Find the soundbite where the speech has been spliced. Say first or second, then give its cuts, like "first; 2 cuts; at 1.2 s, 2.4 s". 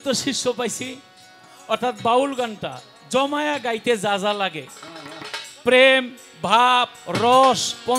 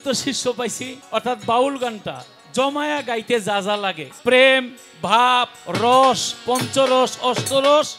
second; 2 cuts; at 0.9 s, 4.1 s